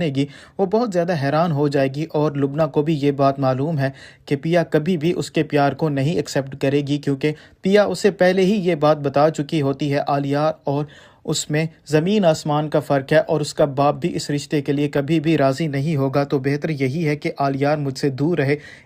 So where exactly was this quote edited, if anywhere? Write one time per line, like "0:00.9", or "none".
0:16.6